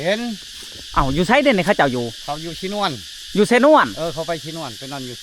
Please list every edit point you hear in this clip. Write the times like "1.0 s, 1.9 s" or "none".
none